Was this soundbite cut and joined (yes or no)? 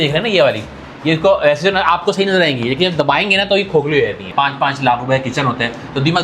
yes